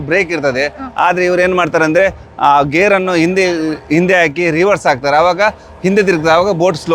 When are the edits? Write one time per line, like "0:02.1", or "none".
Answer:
none